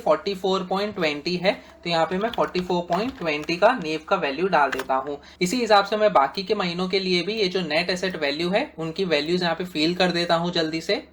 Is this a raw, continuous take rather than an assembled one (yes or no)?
yes